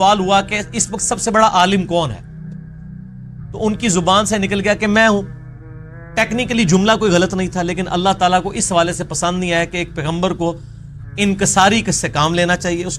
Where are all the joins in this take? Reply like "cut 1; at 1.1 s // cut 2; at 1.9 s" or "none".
cut 1; at 2.3 s // cut 2; at 3.5 s